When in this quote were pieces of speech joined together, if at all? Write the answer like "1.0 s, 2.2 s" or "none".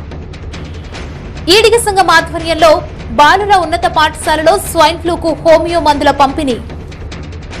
1.4 s, 6.6 s